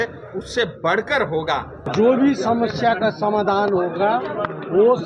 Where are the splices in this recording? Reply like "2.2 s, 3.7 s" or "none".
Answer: 1.9 s

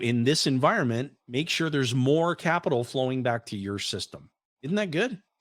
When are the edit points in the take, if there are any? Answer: none

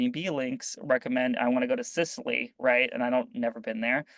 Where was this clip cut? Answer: none

